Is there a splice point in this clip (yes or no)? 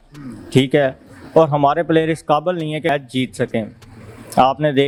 no